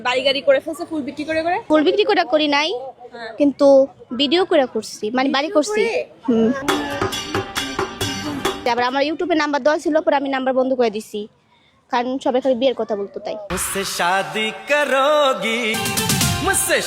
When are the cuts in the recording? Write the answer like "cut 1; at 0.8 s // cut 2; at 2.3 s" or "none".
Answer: cut 1; at 1.6 s // cut 2; at 8.6 s // cut 3; at 15.7 s